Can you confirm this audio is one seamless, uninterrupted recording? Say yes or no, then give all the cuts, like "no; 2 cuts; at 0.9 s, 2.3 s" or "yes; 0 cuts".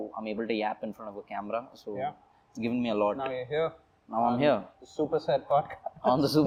yes; 0 cuts